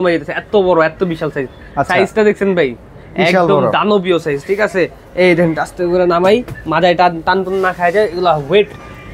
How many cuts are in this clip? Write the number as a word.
zero